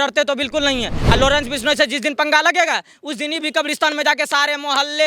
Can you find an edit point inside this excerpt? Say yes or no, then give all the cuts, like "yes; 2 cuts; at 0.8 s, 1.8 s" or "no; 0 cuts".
yes; 1 cut; at 1.0 s